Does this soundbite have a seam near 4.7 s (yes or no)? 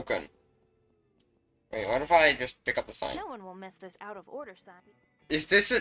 yes